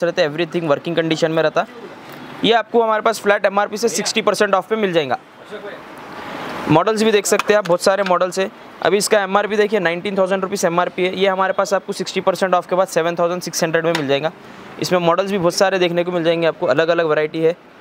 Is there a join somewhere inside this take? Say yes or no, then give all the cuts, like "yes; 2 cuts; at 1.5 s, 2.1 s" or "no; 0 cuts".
no; 0 cuts